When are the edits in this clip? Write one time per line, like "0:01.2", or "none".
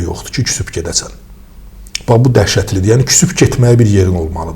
none